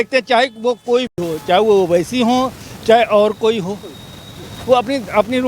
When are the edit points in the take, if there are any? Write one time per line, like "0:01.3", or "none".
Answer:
none